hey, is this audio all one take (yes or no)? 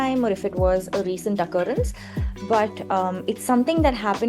yes